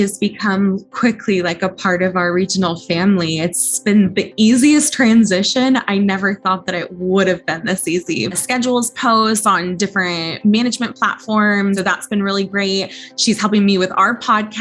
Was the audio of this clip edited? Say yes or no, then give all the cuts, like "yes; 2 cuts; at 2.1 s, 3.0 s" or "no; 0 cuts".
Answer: yes; 2 cuts; at 8.4 s, 11.8 s